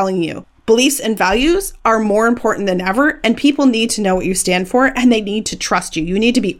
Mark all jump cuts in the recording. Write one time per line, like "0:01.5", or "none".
none